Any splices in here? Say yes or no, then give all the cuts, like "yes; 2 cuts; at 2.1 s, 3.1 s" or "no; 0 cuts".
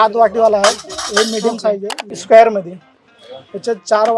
yes; 1 cut; at 2.1 s